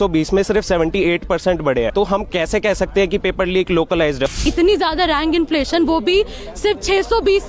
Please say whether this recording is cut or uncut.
cut